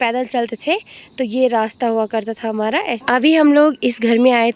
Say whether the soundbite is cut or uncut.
cut